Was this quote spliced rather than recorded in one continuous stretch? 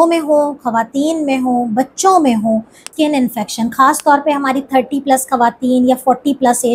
yes; 1 cut; at 2.8 s

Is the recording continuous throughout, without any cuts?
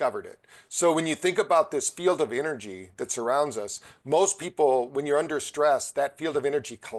yes; 0 cuts

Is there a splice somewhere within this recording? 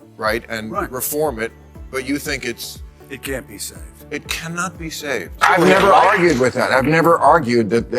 yes; 1 cut; at 5.4 s

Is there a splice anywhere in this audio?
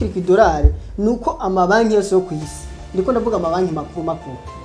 yes; 1 cut; at 2.8 s

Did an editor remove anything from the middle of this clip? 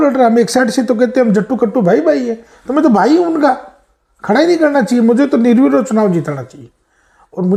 no; 0 cuts

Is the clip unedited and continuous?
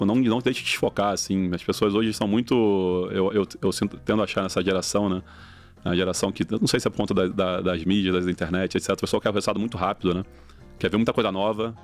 yes; 0 cuts

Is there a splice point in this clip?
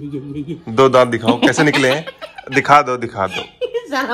no; 0 cuts

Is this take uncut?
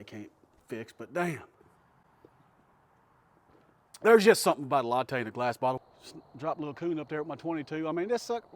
no; 2 cuts; at 1.6 s, 5.8 s

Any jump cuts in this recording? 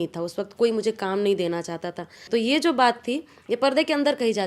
yes; 1 cut; at 2.2 s

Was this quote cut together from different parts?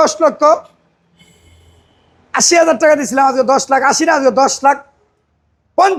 no; 0 cuts

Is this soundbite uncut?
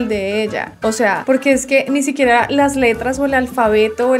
yes; 0 cuts

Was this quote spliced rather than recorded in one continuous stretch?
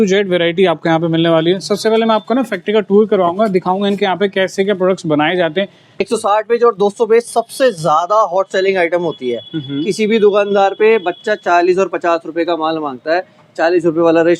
yes; 1 cut; at 6.1 s

